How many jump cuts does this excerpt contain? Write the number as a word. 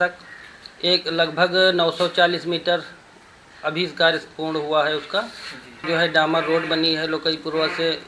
one